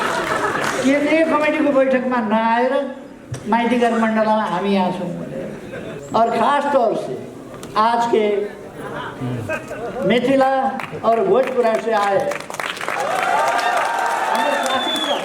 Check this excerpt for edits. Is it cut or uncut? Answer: cut